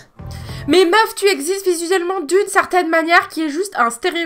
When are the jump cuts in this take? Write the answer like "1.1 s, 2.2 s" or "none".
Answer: none